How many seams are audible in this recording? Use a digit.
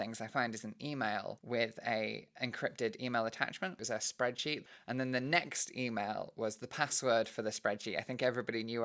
3